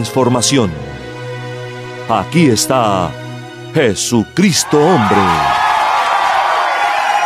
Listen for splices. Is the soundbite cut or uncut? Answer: uncut